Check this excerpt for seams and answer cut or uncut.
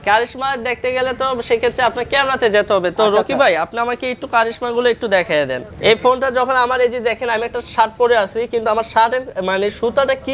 uncut